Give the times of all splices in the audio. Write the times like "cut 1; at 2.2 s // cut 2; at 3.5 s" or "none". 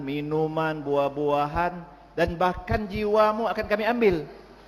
none